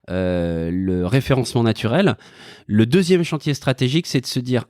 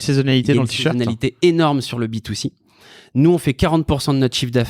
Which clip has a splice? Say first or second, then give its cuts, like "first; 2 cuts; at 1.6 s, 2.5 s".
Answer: first; 1 cut; at 2.3 s